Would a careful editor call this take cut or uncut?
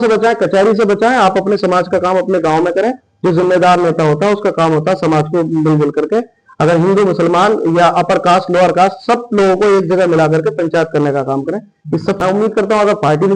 cut